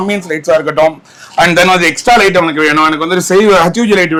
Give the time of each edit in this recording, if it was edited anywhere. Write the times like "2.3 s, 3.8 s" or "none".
none